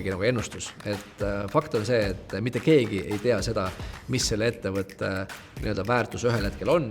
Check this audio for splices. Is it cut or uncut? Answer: uncut